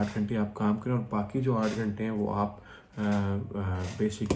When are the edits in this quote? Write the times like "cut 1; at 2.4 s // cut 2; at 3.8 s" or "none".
none